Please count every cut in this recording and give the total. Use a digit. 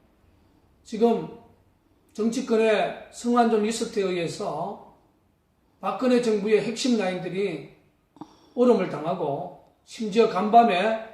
1